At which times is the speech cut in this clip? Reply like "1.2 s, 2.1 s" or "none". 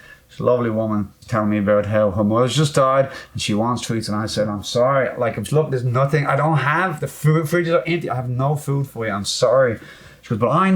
1.2 s